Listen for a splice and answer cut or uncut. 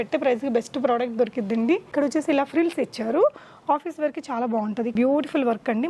cut